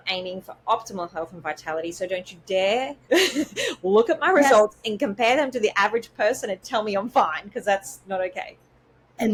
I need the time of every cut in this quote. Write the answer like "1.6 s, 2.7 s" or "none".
none